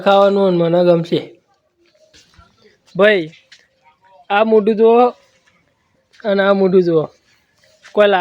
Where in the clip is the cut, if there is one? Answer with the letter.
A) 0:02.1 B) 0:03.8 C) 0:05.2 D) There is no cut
A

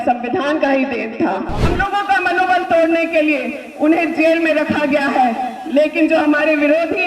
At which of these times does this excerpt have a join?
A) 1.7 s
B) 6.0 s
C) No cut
A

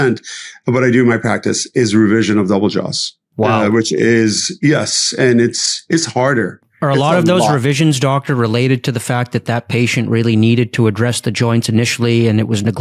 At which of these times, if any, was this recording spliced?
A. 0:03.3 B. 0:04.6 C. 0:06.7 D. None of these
A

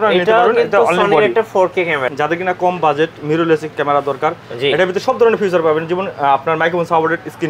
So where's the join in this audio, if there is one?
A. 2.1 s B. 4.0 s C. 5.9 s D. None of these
A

